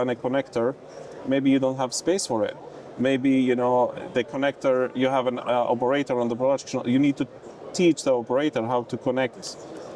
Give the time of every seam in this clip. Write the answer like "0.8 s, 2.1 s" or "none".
none